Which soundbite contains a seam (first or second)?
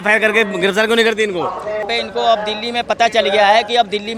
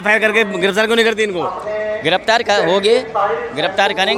first